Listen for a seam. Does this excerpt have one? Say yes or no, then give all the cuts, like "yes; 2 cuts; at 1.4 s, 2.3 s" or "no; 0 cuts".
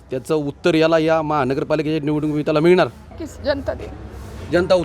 yes; 1 cut; at 3.1 s